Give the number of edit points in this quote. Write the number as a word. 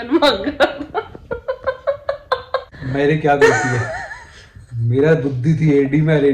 one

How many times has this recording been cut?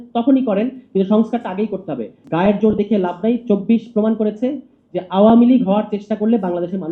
one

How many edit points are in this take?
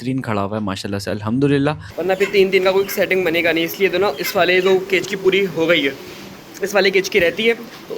one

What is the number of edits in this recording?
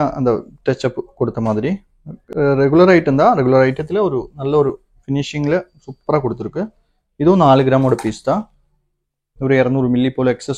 zero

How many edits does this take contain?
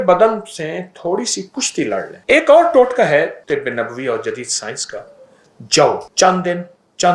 three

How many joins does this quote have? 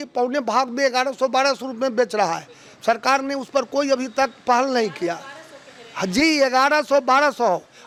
zero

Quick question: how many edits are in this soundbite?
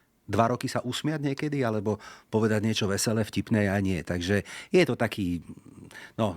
zero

